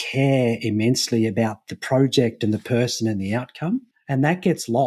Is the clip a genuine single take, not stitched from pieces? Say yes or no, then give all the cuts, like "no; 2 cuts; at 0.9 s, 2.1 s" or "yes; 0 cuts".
no; 1 cut; at 4.0 s